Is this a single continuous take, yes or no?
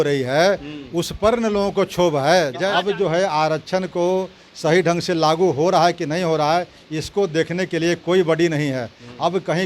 no